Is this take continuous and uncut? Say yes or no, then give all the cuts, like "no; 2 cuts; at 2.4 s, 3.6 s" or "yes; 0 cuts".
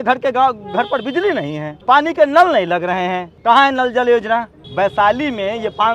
no; 3 cuts; at 1.7 s, 3.3 s, 4.6 s